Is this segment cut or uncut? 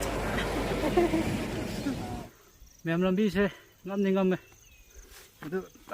cut